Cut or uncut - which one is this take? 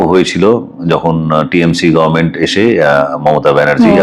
uncut